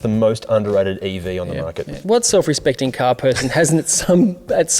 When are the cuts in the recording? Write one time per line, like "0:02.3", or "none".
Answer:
0:02.0